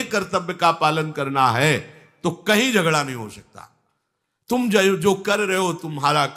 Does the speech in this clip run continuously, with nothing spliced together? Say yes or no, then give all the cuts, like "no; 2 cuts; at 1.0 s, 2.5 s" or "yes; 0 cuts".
yes; 0 cuts